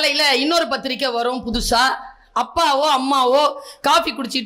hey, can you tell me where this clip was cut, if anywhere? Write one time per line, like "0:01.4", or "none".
none